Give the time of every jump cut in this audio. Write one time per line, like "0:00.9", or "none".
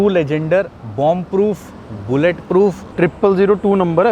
0:02.8